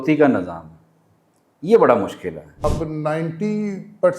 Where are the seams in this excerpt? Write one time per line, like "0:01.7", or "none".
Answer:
0:02.6